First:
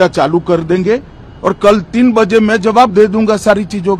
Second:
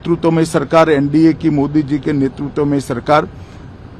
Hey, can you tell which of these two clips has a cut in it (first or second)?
first